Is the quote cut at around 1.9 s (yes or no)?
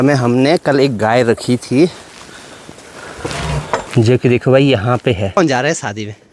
no